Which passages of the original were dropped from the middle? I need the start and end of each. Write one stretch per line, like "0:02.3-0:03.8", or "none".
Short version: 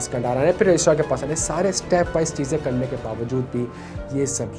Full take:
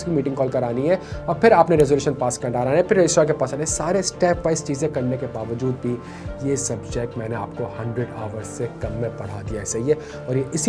none